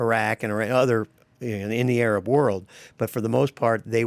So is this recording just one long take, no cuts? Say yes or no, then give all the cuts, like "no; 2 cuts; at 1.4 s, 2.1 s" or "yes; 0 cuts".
yes; 0 cuts